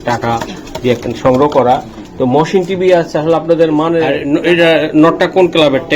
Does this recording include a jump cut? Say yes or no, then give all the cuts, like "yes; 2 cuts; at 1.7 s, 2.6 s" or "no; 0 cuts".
yes; 1 cut; at 4.2 s